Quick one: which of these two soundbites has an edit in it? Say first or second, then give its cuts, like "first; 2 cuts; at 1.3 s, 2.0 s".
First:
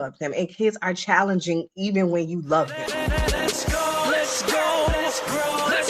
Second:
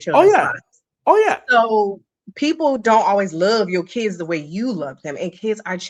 first; 1 cut; at 2.7 s